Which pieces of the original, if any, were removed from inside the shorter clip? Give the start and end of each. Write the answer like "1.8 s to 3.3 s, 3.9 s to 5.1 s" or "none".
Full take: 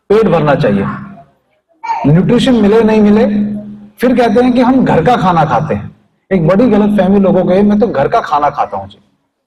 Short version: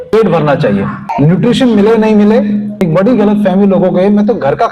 1.1 s to 1.9 s, 3.6 s to 6.2 s